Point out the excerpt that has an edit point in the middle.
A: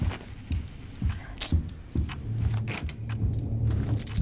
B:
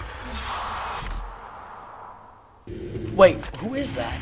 B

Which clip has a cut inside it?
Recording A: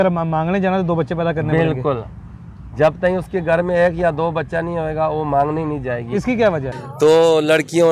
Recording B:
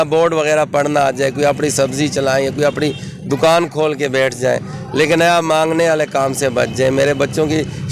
A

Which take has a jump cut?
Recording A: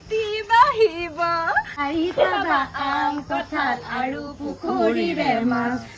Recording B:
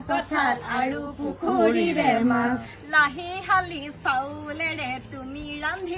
A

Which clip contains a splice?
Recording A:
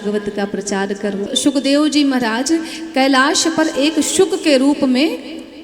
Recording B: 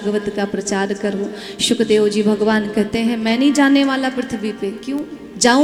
A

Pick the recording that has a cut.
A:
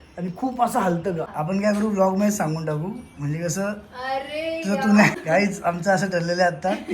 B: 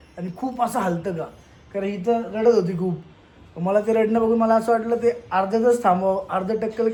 A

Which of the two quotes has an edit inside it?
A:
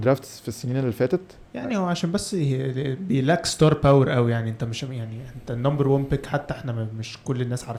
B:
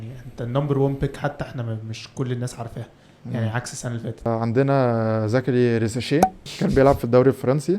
B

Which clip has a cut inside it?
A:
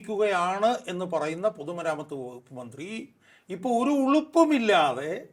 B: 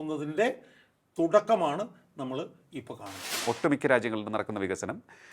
B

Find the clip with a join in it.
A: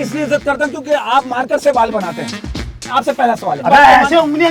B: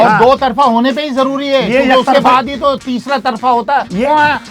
A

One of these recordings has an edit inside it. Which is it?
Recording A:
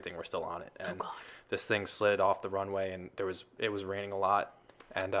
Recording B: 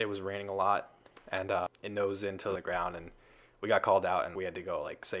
B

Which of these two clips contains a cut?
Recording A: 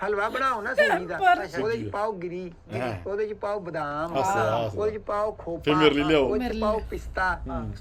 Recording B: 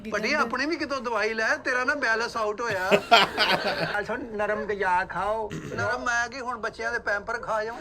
B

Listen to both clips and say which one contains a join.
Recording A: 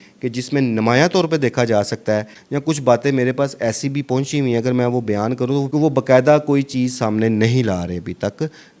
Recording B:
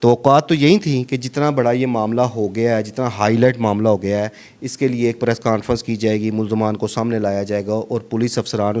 A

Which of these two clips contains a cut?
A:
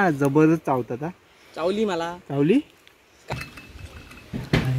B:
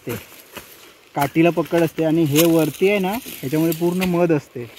A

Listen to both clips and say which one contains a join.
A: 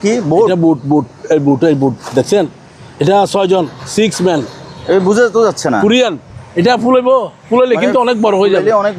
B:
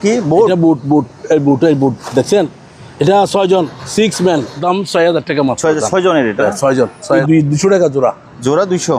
B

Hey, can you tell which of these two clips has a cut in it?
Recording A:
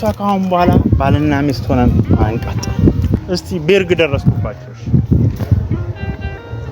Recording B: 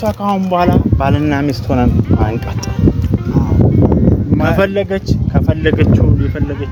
A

